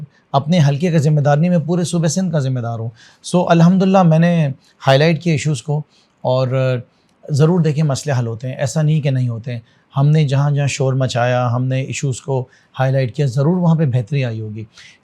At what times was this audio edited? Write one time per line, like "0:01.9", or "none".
none